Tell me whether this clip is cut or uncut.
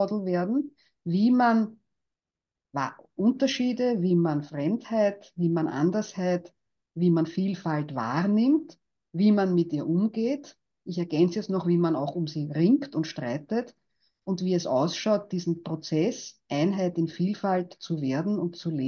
uncut